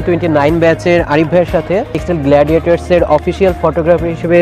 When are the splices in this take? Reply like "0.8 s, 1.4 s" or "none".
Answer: 2.0 s